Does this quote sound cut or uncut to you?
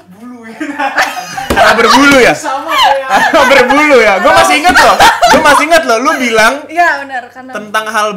uncut